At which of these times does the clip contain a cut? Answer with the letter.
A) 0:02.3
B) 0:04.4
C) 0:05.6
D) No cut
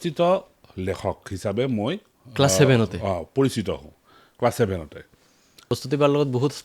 C